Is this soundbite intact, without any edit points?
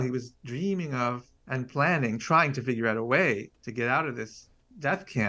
no; 2 cuts; at 1.3 s, 3.6 s

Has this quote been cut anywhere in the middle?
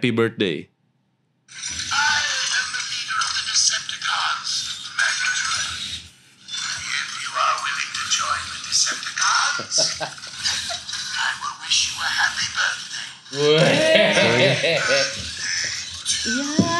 no; 0 cuts

